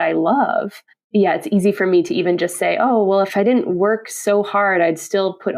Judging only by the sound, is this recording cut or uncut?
cut